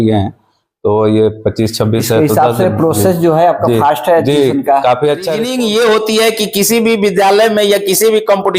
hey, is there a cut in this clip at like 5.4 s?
yes; 1 cut; at 5.4 s

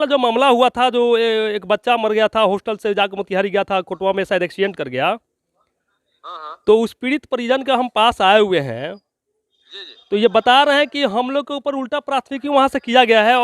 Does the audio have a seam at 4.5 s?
no; 0 cuts

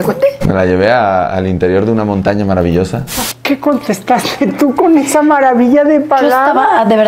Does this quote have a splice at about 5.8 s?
no; 1 cut; at 3.1 s

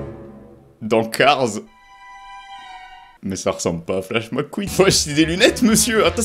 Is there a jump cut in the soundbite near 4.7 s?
yes; 1 cut; at 4.7 s

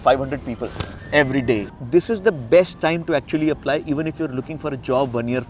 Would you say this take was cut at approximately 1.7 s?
yes; 1 cut; at 1.7 s

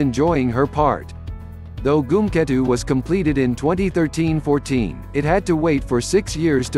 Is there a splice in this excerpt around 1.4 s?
no; 0 cuts

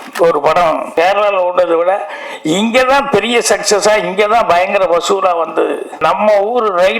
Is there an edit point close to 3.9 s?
no; 2 cuts; at 0.9 s, 5.9 s

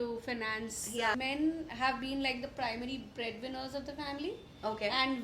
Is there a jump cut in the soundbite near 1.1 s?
yes; 1 cut; at 1.1 s

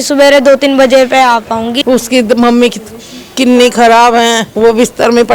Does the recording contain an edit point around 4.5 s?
yes; 2 cuts; at 1.7 s, 4.5 s

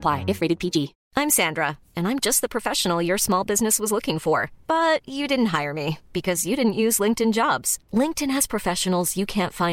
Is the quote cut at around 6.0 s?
no; 1 cut; at 1.0 s

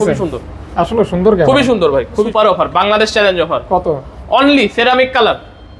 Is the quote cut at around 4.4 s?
no; 1 cut; at 2.2 s

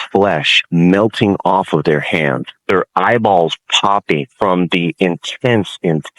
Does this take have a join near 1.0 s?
no; 2 cuts; at 2.5 s, 4.3 s

